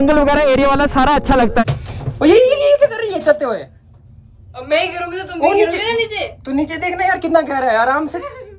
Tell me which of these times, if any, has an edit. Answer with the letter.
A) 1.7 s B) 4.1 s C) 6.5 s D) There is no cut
A